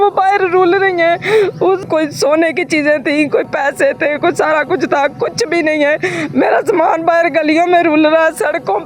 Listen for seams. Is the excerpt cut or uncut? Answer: cut